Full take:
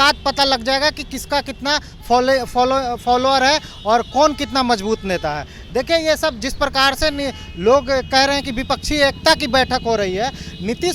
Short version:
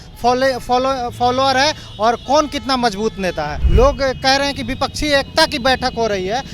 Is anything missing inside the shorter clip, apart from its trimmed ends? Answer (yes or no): yes